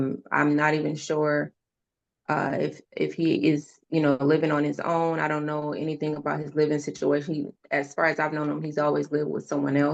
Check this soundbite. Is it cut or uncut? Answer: uncut